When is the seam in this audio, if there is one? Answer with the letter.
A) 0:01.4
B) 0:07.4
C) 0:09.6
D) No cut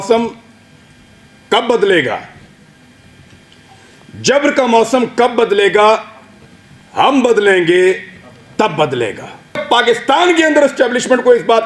C